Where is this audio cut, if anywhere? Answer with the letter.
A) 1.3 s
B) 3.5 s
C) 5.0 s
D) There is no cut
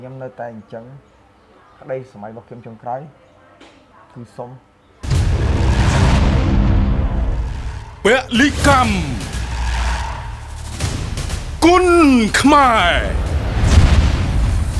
C